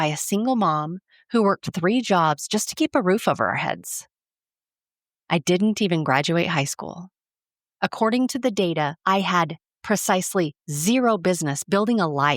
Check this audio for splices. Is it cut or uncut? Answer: cut